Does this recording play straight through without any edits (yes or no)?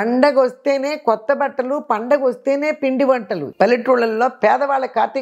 no